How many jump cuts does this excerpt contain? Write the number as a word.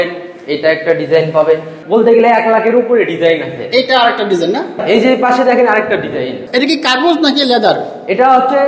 three